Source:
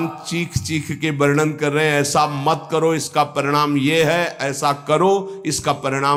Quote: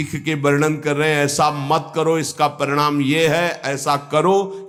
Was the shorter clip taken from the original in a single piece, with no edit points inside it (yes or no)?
yes